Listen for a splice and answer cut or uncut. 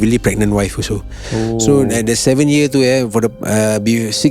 uncut